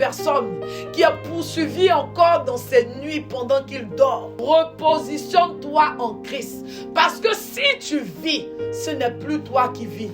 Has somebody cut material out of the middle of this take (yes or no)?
yes